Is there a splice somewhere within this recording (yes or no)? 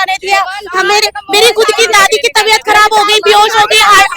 no